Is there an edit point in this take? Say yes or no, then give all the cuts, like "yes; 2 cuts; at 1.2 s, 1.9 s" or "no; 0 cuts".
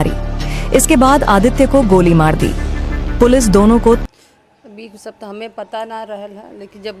yes; 1 cut; at 4.0 s